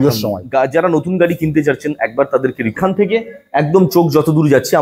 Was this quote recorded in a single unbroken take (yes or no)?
no